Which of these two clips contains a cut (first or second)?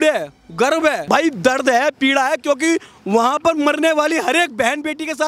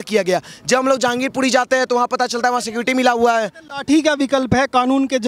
first